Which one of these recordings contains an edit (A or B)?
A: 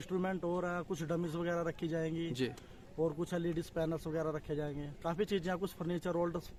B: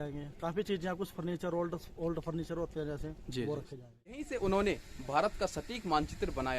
B